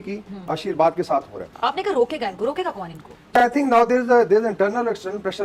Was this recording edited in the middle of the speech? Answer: no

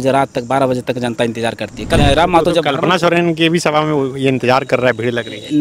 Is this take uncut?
no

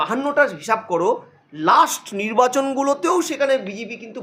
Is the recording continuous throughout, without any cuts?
yes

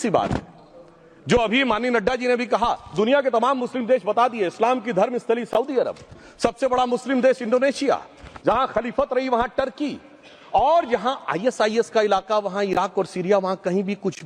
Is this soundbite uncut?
yes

